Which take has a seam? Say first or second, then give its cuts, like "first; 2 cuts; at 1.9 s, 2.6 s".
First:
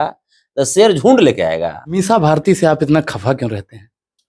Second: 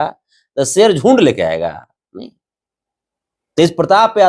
first; 1 cut; at 2.0 s